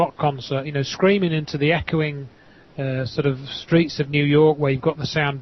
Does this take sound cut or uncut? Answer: uncut